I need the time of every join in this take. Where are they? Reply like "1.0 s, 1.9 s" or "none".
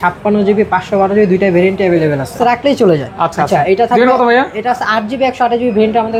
2.3 s